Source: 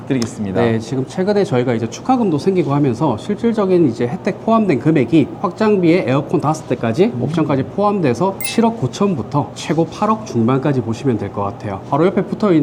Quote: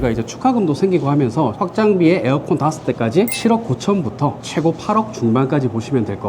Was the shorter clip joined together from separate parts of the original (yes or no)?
yes